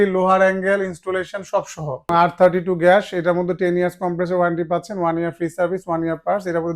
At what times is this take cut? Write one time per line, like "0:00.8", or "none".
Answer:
0:02.1